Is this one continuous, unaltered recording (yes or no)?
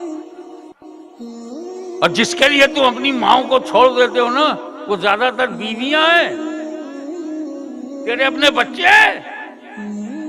no